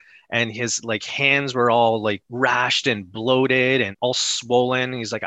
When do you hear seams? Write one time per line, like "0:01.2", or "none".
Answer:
0:02.3
0:03.9